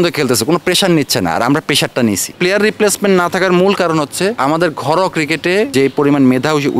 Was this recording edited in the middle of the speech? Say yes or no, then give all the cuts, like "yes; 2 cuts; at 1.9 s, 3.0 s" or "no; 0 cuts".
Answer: yes; 3 cuts; at 2.3 s, 4.4 s, 5.7 s